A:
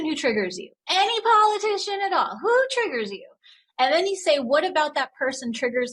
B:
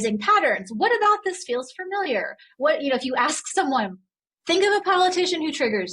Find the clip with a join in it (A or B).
B